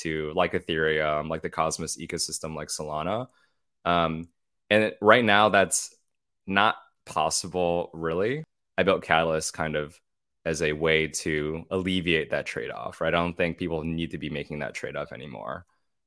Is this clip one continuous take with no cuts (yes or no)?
no